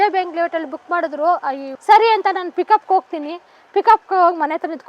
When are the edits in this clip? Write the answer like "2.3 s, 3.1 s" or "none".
none